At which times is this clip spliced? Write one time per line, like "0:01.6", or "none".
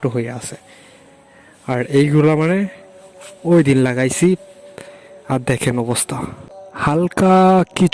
0:06.5